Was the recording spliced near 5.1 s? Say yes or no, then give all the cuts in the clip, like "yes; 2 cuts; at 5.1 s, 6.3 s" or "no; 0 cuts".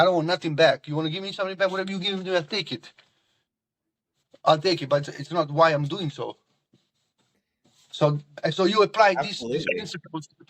yes; 2 cuts; at 5.1 s, 8.3 s